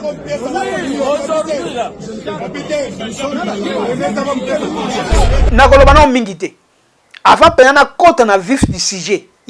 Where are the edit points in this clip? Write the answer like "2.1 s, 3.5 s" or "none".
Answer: 5.5 s